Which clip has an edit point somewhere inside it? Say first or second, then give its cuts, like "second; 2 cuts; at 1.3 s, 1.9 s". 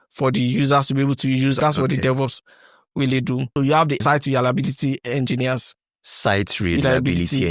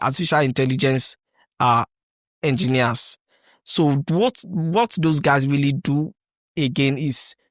first; 2 cuts; at 1.6 s, 3.9 s